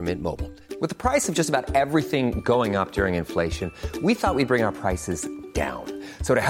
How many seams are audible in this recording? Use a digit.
0